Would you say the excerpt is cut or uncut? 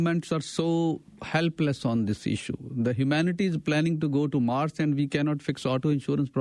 uncut